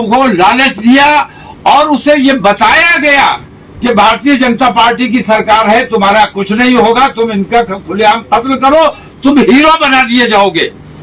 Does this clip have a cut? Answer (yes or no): no